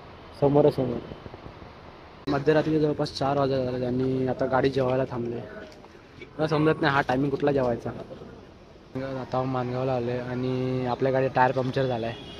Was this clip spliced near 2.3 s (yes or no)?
yes